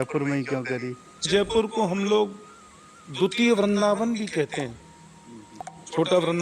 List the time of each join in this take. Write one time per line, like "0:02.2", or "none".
0:01.3